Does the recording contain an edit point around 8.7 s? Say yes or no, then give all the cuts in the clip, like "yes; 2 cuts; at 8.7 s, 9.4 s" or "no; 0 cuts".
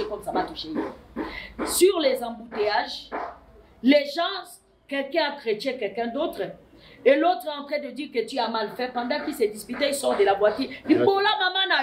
no; 0 cuts